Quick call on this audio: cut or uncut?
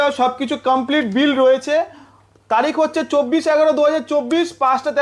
uncut